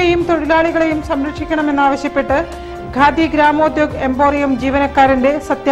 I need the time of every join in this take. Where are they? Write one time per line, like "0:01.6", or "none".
none